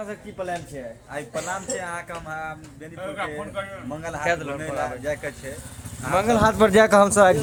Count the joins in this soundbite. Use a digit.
0